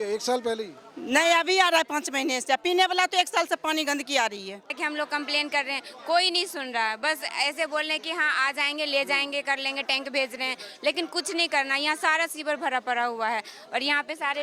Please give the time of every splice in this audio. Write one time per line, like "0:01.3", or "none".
0:04.8